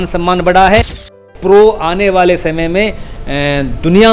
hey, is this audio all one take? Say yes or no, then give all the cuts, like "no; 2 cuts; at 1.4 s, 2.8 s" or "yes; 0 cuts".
no; 1 cut; at 1.2 s